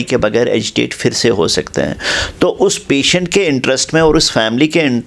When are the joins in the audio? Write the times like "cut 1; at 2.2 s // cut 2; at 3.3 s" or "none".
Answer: none